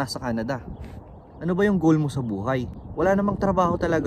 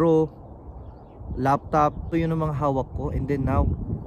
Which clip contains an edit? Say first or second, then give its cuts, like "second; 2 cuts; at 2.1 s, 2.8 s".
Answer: first; 1 cut; at 2.8 s